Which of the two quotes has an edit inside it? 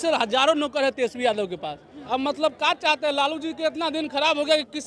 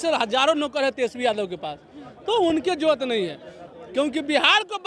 first; 1 cut; at 1.9 s

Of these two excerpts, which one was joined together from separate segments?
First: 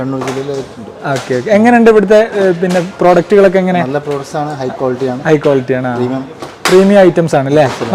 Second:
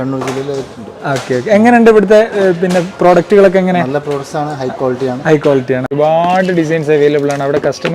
second; 1 cut; at 5.9 s

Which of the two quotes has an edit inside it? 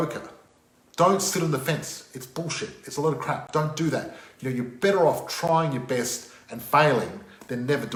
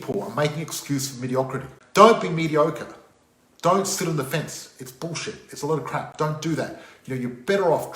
second; 1 cut; at 1.7 s

